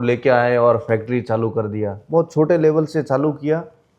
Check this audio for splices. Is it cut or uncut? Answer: uncut